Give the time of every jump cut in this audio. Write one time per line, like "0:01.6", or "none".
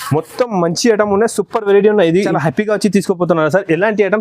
0:02.3